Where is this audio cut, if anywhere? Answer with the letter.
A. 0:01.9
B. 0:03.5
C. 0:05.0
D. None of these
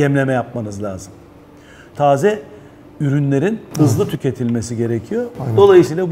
A